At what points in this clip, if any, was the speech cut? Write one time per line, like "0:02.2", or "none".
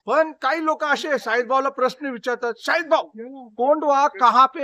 none